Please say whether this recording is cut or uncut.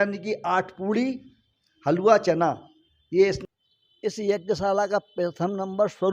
cut